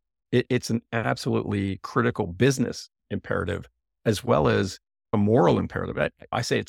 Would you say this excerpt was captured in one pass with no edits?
no; 1 cut; at 3.0 s

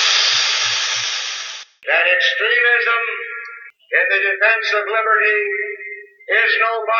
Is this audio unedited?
yes; 0 cuts

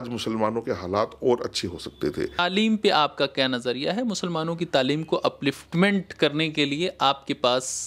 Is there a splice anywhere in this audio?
yes; 1 cut; at 2.4 s

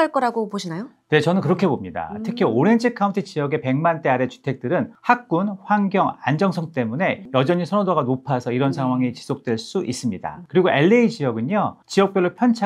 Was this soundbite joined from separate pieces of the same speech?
yes; 4 cuts; at 4.9 s, 7.2 s, 10.3 s, 11.8 s

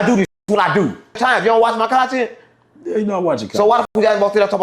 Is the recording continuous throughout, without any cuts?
no; 1 cut; at 1.0 s

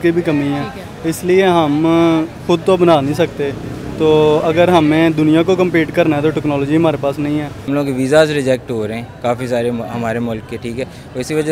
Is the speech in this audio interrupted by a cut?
yes; 1 cut; at 7.6 s

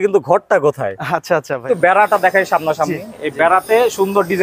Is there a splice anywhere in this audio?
yes; 1 cut; at 1.6 s

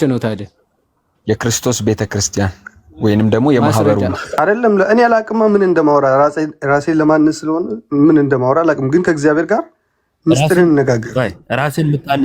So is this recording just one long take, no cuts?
no; 1 cut; at 4.2 s

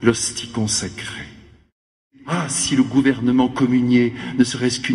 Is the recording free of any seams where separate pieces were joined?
no; 1 cut; at 2.1 s

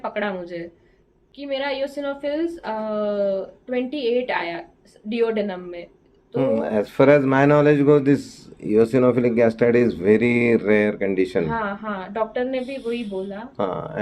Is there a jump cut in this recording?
no; 0 cuts

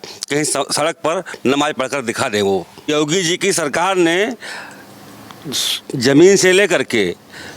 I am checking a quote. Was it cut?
yes; 1 cut; at 2.9 s

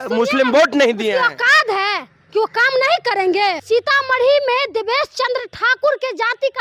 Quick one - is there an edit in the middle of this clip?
yes; 1 cut; at 3.6 s

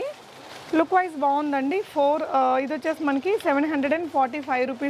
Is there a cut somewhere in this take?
no; 0 cuts

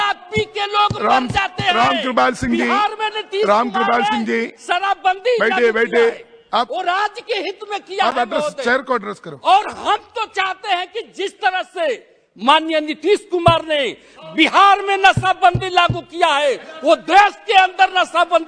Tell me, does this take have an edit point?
no; 0 cuts

